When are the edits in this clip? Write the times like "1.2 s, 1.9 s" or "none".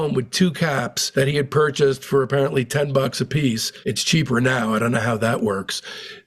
3.7 s